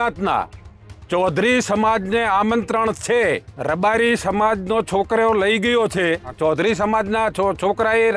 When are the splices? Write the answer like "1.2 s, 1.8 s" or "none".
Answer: 3.5 s, 6.3 s